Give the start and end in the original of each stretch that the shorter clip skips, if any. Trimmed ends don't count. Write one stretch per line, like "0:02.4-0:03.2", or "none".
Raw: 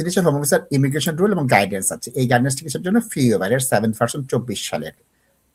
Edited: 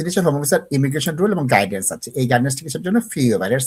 none